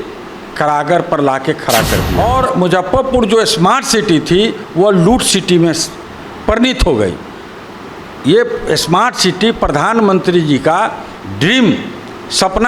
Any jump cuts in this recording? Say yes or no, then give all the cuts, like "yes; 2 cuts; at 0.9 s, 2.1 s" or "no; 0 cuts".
yes; 1 cut; at 2.1 s